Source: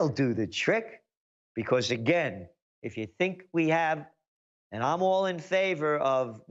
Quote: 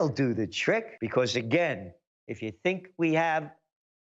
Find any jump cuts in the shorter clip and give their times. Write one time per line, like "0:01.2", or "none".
0:01.0